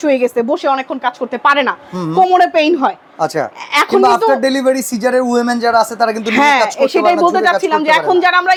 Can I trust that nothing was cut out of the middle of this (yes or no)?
yes